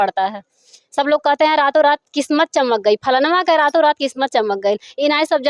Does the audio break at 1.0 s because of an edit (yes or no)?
no